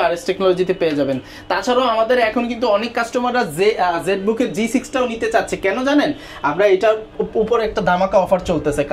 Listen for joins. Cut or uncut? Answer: uncut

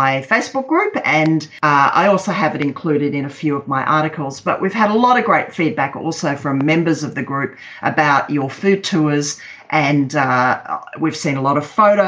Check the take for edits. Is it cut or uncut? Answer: cut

